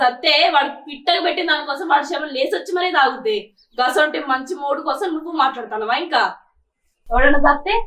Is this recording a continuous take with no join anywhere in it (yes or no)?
no